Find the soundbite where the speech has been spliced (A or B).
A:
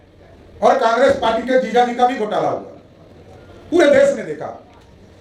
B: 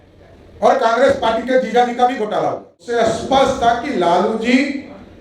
B